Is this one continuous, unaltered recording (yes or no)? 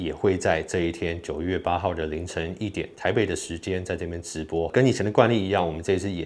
no